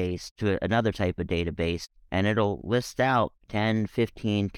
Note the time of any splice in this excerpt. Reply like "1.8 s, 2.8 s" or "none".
1.9 s